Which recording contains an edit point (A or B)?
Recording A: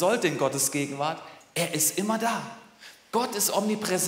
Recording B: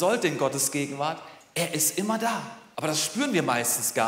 B